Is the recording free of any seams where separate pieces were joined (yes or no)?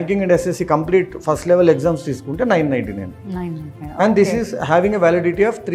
yes